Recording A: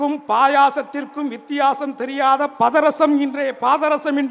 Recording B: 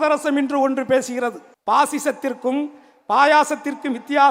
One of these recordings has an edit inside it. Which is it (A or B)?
B